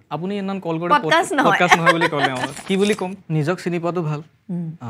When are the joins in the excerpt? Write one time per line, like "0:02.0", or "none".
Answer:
0:03.2